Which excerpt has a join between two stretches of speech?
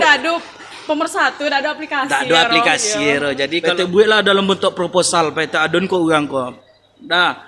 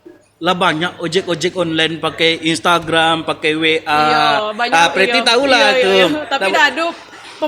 first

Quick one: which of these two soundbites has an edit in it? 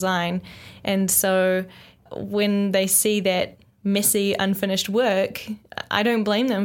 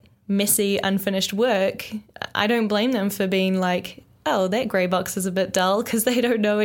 first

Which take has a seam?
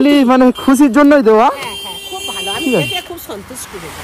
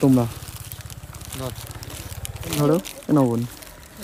second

